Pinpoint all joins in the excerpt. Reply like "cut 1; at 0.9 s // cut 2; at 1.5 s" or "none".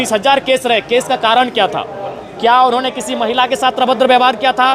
none